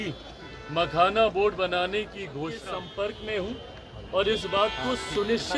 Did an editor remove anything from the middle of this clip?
yes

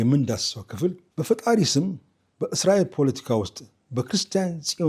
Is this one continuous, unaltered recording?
no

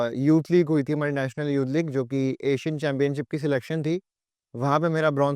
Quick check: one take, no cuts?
yes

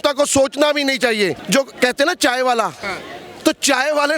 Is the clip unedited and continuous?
no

